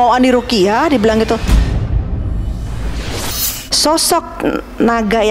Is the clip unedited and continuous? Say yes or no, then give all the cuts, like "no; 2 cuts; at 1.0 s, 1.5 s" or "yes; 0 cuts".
no; 2 cuts; at 1.4 s, 3.5 s